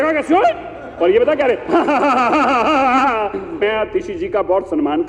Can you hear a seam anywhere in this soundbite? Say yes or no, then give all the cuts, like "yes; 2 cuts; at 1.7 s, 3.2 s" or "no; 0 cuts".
yes; 1 cut; at 3.6 s